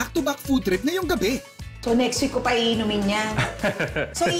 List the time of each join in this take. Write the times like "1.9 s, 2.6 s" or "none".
none

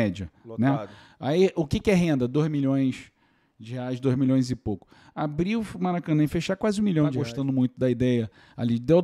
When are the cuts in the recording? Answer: 7.2 s

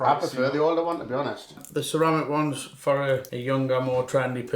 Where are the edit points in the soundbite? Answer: 1.6 s, 3.3 s

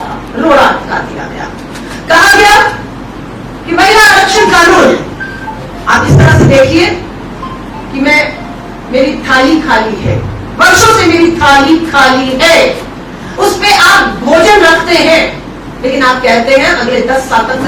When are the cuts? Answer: none

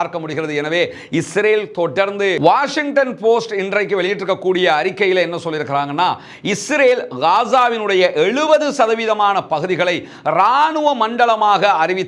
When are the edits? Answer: 2.4 s

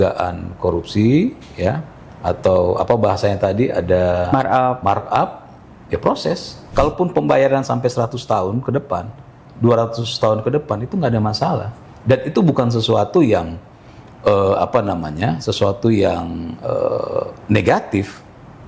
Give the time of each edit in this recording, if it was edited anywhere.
6.6 s

